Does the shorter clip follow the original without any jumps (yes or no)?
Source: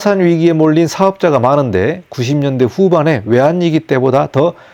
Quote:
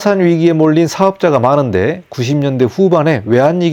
yes